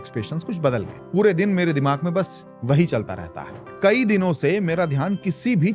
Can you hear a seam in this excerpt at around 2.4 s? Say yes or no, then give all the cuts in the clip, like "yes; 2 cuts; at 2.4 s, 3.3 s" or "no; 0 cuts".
no; 2 cuts; at 1.0 s, 3.7 s